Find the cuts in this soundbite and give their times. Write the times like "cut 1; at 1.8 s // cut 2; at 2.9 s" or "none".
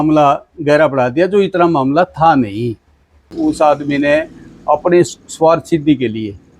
cut 1; at 3.3 s